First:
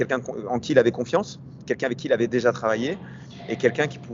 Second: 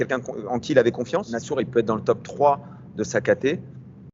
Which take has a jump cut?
second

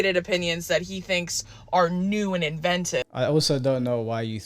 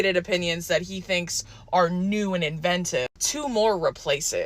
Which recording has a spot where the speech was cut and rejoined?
second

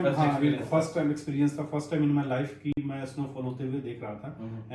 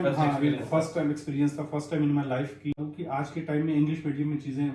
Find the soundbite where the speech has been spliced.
second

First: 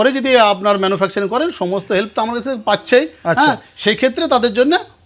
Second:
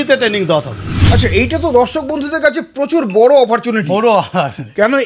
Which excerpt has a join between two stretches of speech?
second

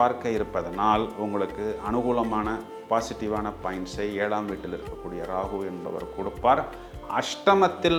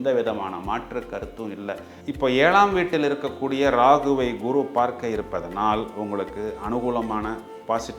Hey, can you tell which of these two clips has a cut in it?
second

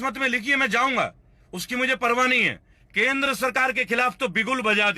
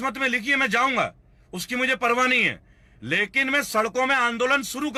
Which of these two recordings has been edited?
first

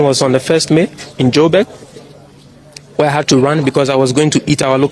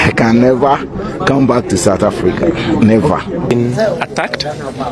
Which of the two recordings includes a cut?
second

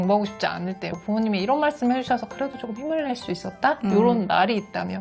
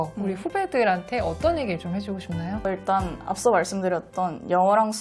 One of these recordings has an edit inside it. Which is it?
first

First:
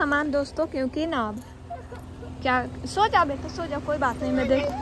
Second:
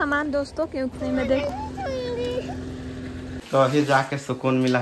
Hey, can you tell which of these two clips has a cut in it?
second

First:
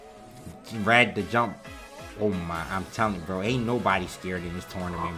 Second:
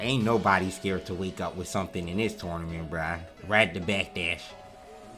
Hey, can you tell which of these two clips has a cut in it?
second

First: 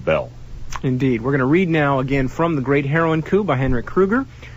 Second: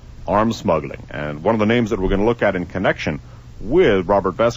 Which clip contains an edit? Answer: second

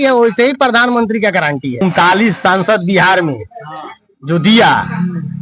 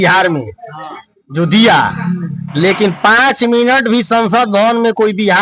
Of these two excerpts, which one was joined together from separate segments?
first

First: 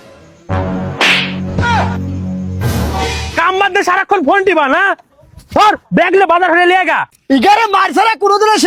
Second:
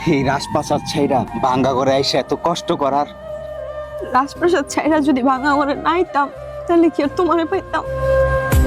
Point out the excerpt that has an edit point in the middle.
second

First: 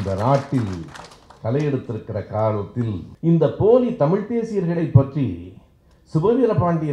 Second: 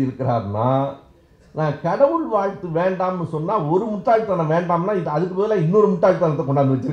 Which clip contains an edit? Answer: first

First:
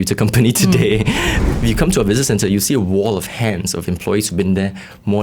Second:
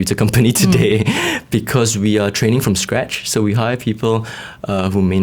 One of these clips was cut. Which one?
first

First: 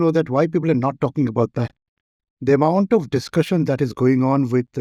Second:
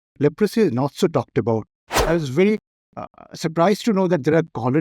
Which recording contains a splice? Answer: second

